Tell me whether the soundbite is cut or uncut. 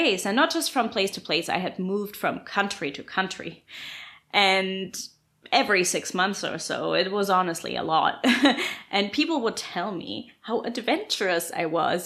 uncut